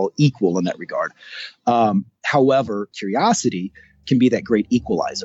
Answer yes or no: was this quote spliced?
yes